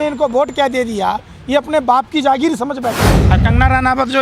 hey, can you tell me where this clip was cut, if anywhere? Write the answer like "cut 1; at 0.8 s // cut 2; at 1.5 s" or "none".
cut 1; at 3.1 s